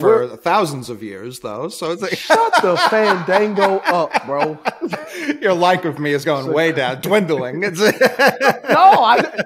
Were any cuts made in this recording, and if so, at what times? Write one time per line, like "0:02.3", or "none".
none

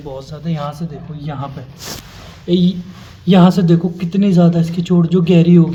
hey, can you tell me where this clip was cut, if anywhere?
none

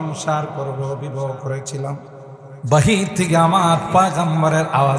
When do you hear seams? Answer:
0:02.1

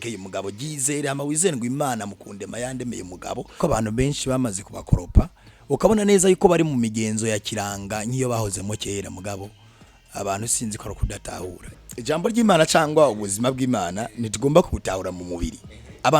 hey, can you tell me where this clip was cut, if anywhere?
0:03.6
0:11.7

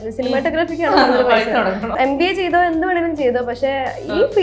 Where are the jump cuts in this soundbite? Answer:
0:01.9

